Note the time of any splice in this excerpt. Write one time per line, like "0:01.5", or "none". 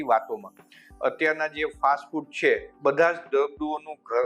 0:02.7